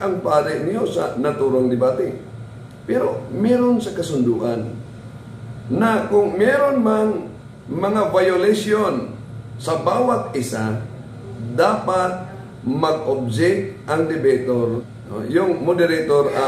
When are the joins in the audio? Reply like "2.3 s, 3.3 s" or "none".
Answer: 14.7 s

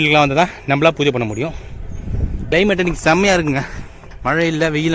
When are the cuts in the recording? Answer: 2.5 s

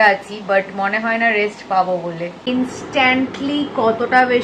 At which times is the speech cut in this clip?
2.4 s

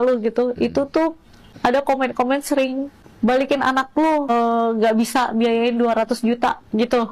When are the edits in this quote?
1.5 s, 2.9 s, 4.3 s

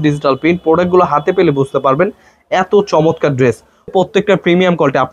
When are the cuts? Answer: 3.9 s

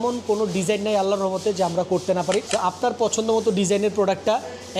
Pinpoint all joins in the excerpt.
2.5 s

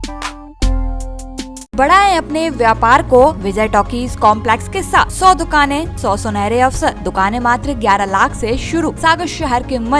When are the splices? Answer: 1.7 s, 3.4 s, 5.1 s, 5.9 s, 7.0 s, 9.0 s

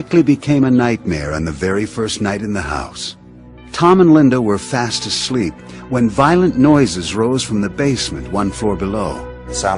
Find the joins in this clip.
6.2 s

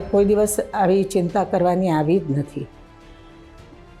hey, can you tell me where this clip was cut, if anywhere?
3.1 s

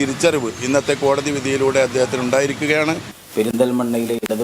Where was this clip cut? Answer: 3.2 s

